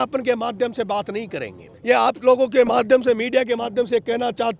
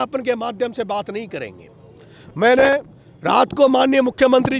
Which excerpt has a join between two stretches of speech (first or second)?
first